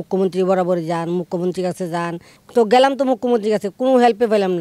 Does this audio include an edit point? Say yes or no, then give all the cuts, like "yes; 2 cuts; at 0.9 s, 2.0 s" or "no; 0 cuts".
yes; 1 cut; at 2.3 s